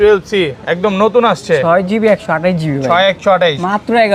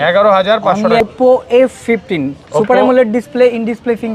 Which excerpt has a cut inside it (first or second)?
second